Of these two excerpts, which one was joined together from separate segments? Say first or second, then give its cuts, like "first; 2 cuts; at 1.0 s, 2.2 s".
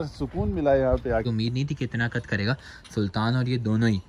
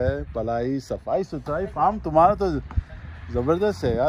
first; 1 cut; at 1.3 s